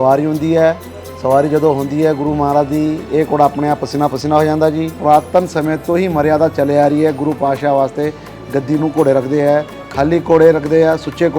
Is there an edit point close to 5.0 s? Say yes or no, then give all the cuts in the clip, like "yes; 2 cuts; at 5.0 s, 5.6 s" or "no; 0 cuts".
yes; 1 cut; at 5.0 s